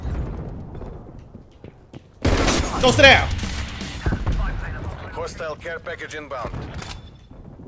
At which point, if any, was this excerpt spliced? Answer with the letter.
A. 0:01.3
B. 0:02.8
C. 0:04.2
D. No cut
D